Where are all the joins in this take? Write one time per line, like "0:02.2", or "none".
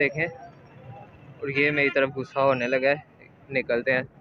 none